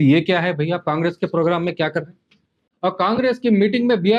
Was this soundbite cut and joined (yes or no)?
yes